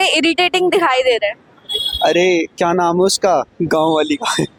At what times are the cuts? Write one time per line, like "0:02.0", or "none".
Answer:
none

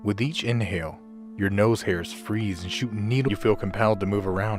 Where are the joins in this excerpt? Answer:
none

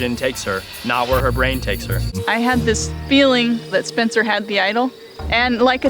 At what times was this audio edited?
0:02.1

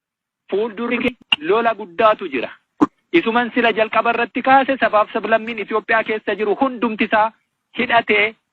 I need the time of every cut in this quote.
0:00.9

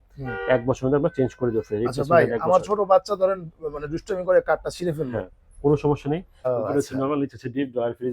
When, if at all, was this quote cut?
0:06.3

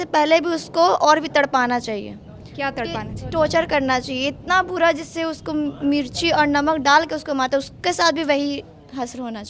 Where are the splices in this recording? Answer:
none

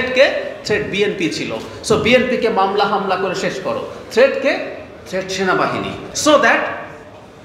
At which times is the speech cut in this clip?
0:06.1

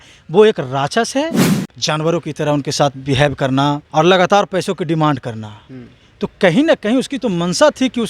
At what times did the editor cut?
0:01.5
0:03.8

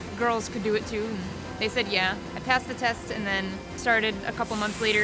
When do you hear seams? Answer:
0:02.3
0:03.7

